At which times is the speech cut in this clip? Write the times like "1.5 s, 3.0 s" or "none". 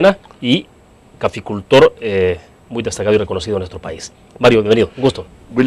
2.1 s